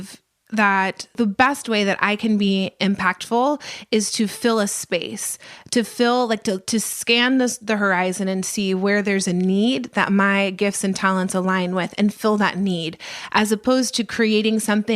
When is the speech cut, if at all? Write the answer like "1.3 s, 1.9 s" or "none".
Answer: 1.1 s

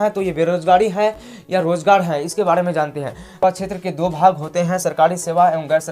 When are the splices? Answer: 3.4 s

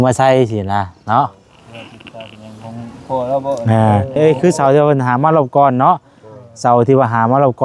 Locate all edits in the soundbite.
4.2 s

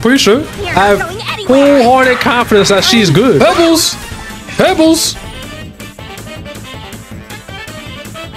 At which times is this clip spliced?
3.4 s

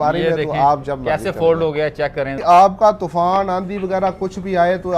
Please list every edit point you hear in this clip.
2.3 s

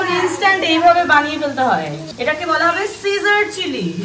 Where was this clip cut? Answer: 2.1 s

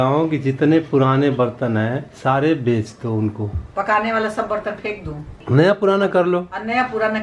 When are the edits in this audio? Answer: 3.7 s, 5.4 s

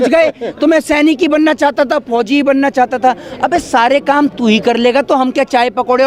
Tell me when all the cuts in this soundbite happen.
none

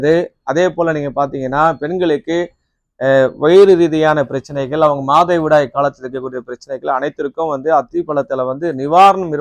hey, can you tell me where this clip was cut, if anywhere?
none

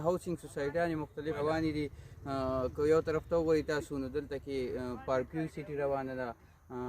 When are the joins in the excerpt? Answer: 1.4 s

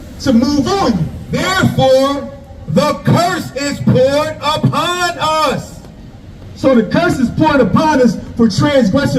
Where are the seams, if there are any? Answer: 1.5 s

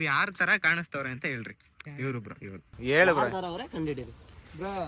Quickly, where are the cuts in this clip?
2.7 s

